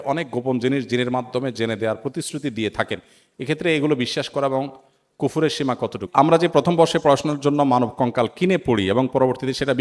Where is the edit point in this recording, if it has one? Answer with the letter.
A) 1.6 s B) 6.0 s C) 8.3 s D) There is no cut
B